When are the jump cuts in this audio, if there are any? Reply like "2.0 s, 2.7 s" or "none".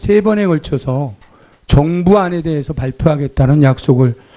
1.9 s

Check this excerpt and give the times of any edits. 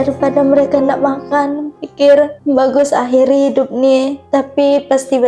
2.4 s, 4.2 s

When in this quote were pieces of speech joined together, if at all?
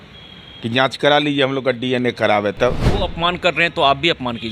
3.0 s

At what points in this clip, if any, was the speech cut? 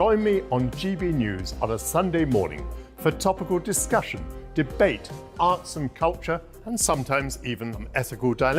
none

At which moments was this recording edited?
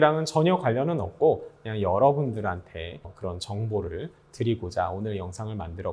3.1 s

